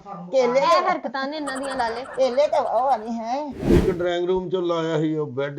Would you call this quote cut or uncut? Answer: cut